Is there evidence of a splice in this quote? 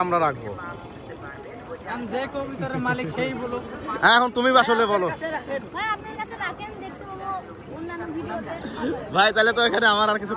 no; 0 cuts

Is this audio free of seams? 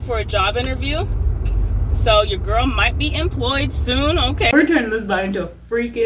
no; 1 cut; at 4.5 s

